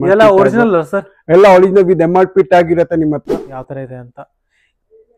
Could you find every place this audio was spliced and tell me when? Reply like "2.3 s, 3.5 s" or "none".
3.4 s